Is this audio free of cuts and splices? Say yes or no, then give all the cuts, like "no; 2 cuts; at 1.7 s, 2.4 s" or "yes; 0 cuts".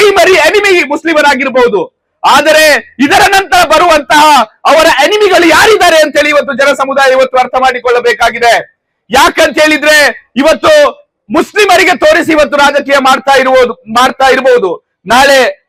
yes; 0 cuts